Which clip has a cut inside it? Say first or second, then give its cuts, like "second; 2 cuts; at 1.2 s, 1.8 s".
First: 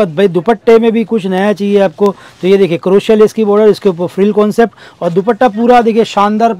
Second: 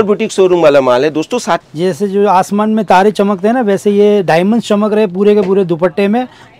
second; 1 cut; at 1.6 s